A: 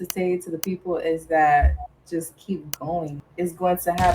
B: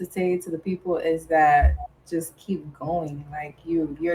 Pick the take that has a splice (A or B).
A